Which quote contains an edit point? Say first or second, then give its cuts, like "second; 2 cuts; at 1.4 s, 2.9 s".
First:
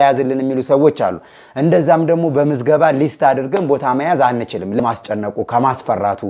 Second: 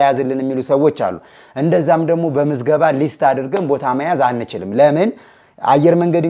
first; 1 cut; at 4.8 s